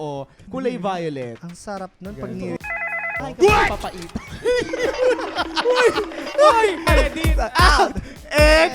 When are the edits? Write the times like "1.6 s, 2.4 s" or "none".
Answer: 6.9 s

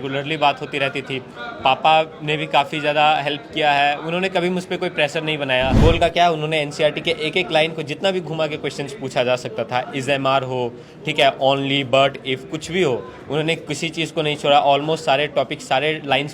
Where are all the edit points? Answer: 5.8 s

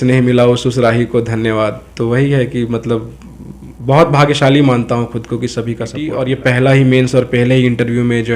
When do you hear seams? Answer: 6.4 s

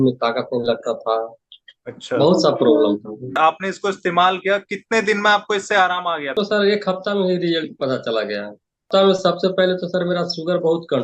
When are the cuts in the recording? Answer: 3.3 s, 6.3 s, 8.9 s

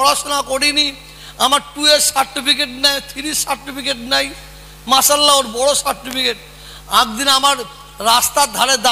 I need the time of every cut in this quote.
none

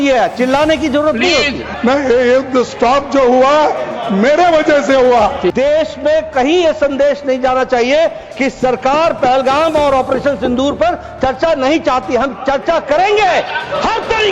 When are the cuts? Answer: 1.6 s, 5.5 s

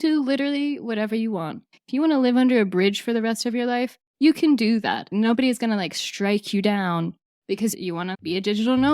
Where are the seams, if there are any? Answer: 7.7 s

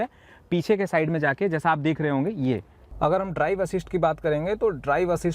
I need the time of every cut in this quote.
2.9 s

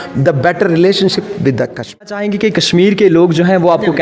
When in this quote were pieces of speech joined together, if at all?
2.2 s

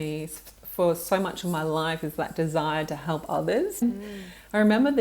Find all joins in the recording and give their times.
3.8 s

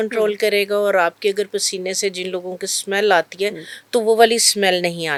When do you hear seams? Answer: none

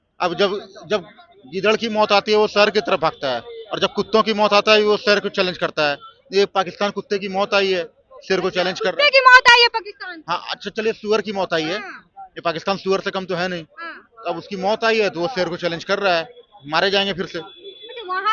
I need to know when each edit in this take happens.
none

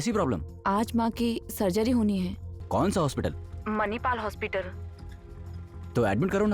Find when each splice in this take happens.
2.5 s

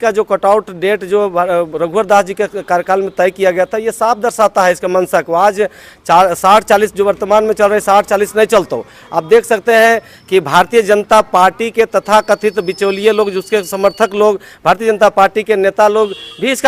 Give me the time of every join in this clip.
none

